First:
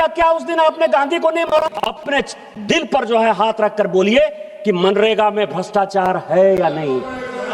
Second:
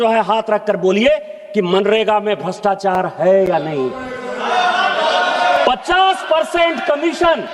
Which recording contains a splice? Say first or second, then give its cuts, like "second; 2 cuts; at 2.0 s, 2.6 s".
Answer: first; 1 cut; at 1.5 s